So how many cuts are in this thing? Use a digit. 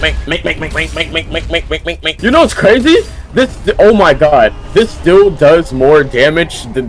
1